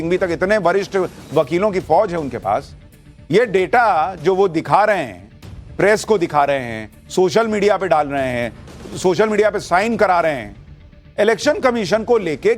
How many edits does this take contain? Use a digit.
1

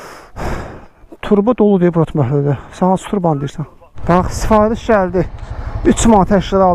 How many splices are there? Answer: 1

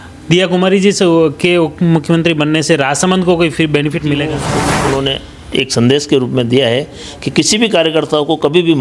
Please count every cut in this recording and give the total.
1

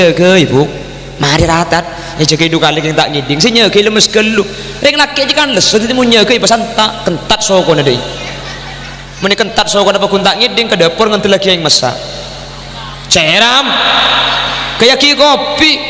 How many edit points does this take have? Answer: 0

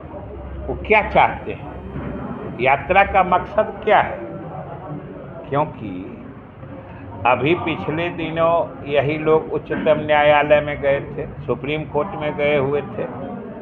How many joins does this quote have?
0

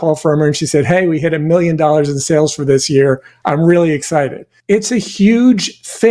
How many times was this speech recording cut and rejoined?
1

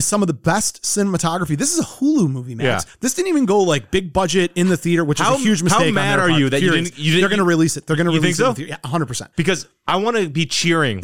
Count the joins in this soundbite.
0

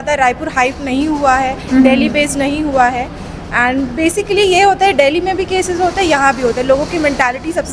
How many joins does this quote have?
0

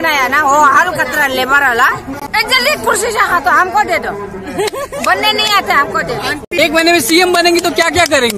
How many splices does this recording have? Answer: 2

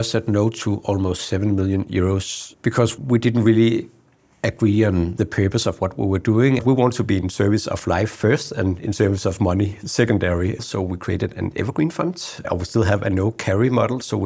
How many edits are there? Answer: 4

